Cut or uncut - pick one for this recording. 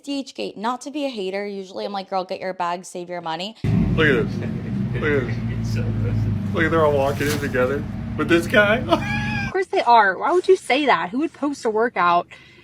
cut